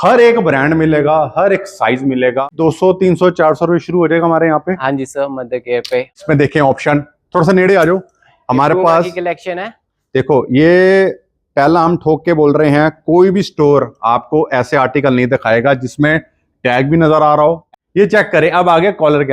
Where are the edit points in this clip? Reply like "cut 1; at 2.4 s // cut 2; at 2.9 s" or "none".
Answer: cut 1; at 2.5 s // cut 2; at 6.2 s // cut 3; at 17.7 s